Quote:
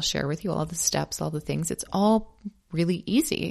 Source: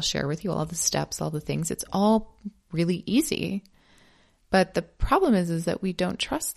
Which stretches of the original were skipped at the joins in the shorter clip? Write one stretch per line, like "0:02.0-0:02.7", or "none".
none